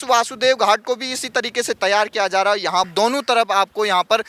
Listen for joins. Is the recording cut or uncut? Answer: cut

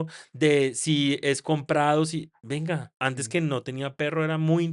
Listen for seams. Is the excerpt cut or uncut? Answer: cut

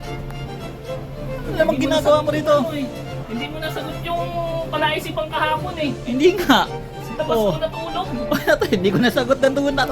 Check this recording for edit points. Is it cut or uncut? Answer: uncut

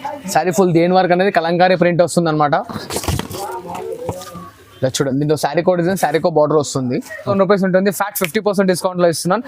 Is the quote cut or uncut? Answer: cut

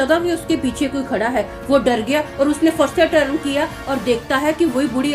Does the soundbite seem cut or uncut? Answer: uncut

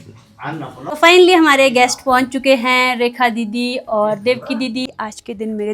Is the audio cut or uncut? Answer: cut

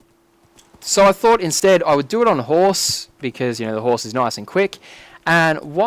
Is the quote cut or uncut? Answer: uncut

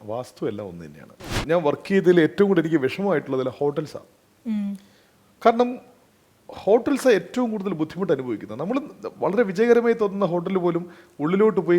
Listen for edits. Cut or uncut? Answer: cut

